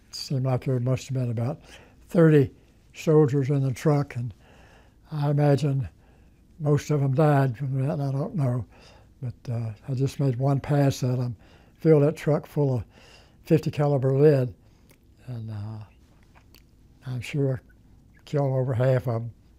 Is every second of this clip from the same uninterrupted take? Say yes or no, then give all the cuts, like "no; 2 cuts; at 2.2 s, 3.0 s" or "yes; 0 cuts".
yes; 0 cuts